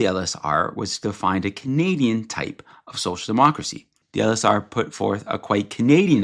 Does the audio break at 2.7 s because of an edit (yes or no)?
no